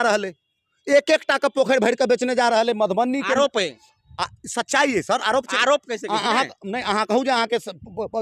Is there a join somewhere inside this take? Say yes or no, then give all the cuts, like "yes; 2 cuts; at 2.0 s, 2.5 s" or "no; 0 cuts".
no; 0 cuts